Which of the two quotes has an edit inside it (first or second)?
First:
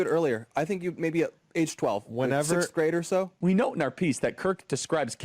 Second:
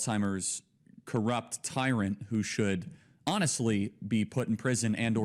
first